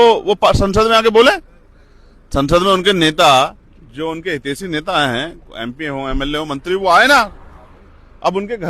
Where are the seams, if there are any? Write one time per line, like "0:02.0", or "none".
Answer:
none